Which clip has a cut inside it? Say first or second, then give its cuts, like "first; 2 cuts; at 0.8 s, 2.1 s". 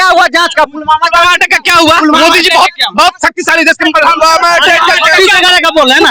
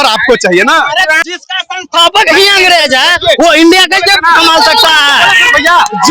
second; 1 cut; at 1.3 s